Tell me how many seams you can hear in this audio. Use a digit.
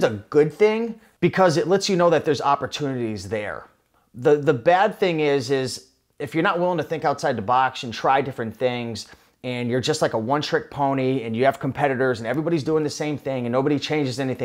1